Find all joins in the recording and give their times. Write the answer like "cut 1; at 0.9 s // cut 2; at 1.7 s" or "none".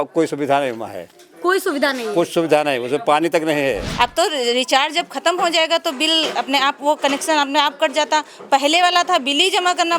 cut 1; at 3.9 s

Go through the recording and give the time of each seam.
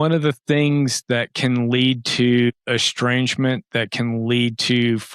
cut 1; at 2.6 s

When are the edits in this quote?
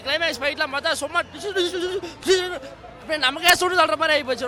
none

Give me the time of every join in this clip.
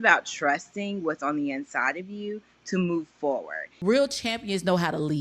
cut 1; at 3.6 s

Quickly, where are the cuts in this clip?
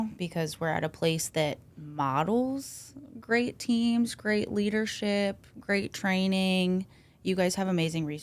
none

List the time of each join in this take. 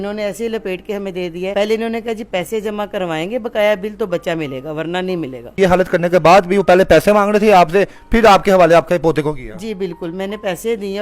cut 1; at 1.5 s // cut 2; at 5.6 s

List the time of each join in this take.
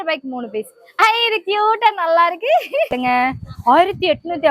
cut 1; at 2.9 s

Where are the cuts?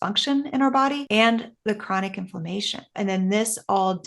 cut 1; at 1.0 s // cut 2; at 3.0 s

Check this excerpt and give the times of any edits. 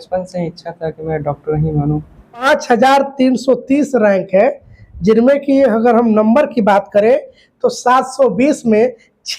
cut 1; at 2.4 s

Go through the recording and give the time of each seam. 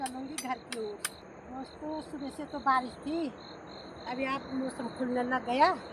cut 1; at 1.2 s

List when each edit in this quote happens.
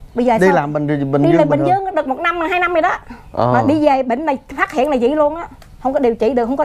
none

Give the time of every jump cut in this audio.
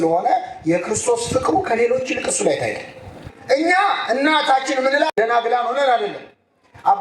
cut 1; at 3.3 s

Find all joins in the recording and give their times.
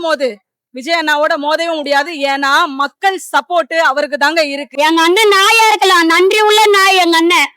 cut 1; at 4.6 s

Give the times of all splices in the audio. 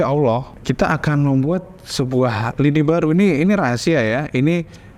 none

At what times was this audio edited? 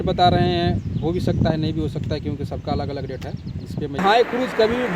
cut 1; at 4.0 s

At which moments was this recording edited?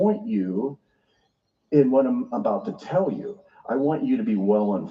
none

